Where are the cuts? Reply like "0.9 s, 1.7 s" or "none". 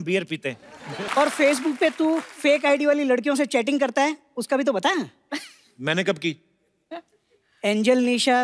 1.0 s